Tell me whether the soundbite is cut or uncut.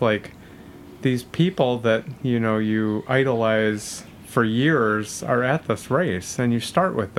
uncut